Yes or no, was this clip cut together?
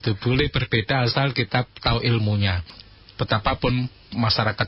yes